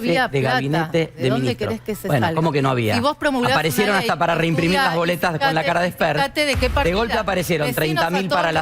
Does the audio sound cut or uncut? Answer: uncut